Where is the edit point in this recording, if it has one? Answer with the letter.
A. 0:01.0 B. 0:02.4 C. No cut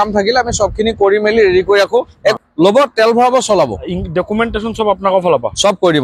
B